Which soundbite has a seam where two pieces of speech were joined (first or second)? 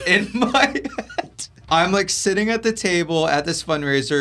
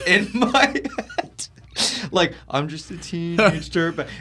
first